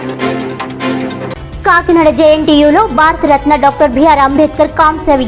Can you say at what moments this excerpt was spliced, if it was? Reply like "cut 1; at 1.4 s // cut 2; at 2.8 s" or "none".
cut 1; at 1.1 s